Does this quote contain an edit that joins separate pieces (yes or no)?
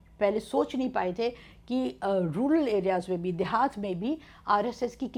no